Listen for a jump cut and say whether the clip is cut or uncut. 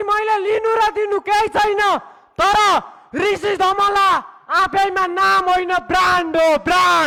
uncut